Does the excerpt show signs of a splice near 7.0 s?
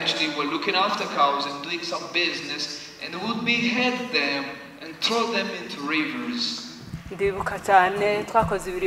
no; 0 cuts

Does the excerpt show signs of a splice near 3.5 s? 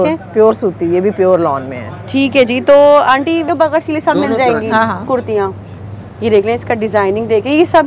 yes; 1 cut; at 3.5 s

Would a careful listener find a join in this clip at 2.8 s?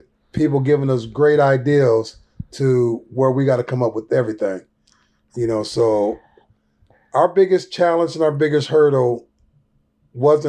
no; 0 cuts

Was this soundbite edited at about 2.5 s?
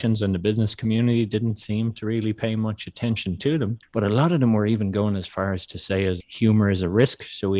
no; 2 cuts; at 3.8 s, 6.3 s

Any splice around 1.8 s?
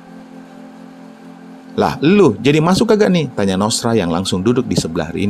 yes; 1 cut; at 1.8 s

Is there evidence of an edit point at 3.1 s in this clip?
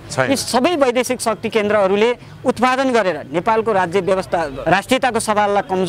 no; 1 cut; at 4.5 s

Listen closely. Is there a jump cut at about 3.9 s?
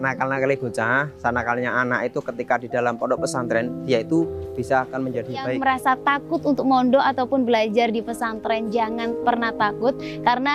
no; 1 cut; at 5.6 s

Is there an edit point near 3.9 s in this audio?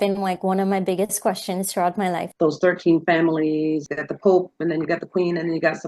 yes; 2 cuts; at 2.3 s, 3.9 s

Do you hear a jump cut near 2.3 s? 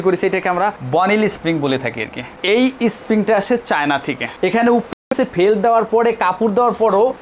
no; 1 cut; at 4.2 s

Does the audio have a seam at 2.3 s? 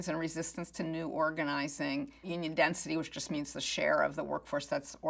yes; 1 cut; at 2.3 s

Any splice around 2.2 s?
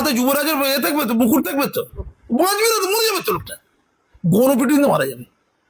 yes; 1 cut; at 2.2 s

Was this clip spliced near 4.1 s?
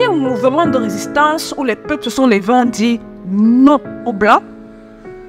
no; 0 cuts

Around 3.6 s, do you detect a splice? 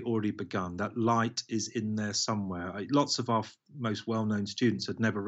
no; 0 cuts

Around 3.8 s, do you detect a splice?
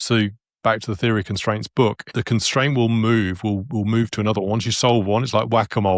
no; 1 cut; at 2.0 s

